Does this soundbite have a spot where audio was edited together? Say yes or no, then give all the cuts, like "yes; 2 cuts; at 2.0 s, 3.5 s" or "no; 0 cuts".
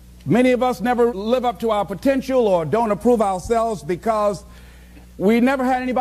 yes; 1 cut; at 3.6 s